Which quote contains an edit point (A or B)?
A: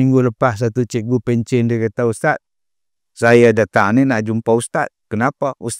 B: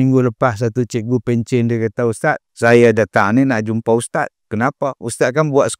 B